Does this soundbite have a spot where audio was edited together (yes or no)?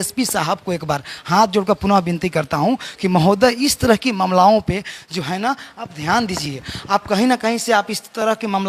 no